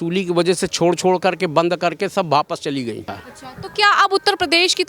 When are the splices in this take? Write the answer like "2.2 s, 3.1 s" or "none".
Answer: 3.1 s